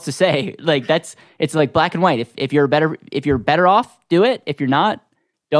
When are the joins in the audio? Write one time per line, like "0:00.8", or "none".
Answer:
none